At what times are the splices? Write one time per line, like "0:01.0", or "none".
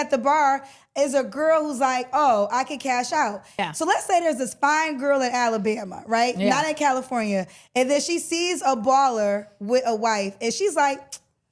0:03.6